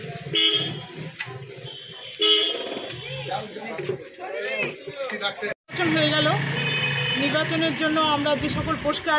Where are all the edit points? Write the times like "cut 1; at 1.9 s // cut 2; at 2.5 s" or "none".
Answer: cut 1; at 5.6 s